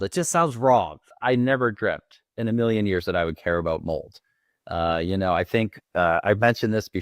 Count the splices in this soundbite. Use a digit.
1